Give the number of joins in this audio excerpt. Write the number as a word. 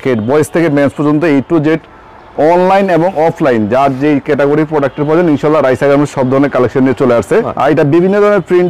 one